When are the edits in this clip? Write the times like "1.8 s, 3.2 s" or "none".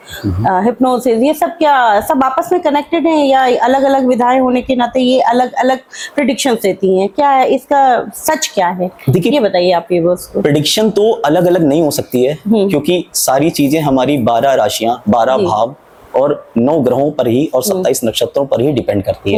none